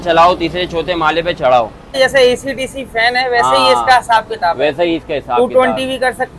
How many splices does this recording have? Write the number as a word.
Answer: one